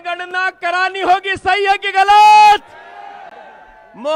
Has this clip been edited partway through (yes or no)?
no